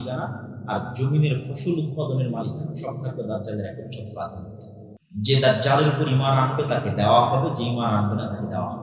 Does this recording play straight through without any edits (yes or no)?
no